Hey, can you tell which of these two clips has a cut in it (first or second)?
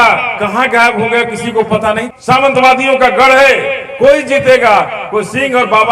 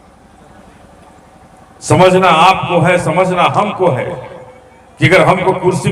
first